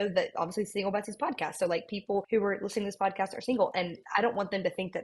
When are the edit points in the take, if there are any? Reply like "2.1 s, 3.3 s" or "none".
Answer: 2.3 s